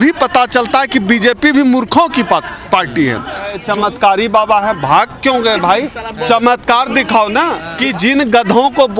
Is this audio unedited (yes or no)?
no